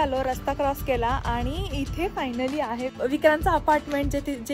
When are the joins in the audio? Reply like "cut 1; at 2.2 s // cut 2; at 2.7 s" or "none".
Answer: cut 1; at 3.0 s